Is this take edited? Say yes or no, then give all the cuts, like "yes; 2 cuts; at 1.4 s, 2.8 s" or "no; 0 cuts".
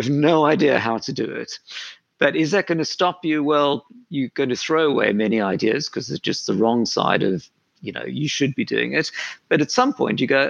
no; 0 cuts